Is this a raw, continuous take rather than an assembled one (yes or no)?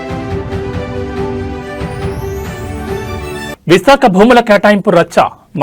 no